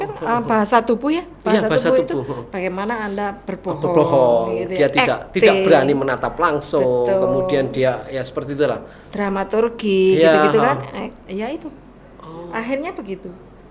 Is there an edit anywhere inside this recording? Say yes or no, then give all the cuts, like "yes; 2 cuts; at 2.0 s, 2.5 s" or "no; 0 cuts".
no; 0 cuts